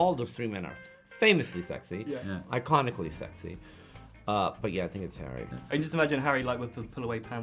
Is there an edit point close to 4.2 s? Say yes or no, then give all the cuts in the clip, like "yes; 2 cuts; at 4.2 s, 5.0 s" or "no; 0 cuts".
no; 1 cut; at 5.5 s